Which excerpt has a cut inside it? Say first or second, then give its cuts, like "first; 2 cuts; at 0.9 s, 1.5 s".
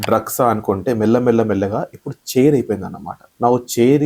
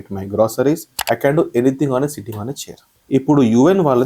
second; 1 cut; at 0.9 s